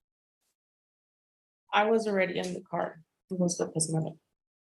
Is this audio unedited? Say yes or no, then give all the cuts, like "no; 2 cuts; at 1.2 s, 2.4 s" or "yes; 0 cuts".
no; 1 cut; at 3.5 s